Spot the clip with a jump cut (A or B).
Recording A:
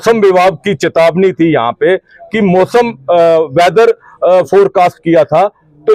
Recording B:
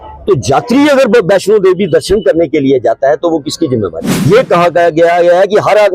B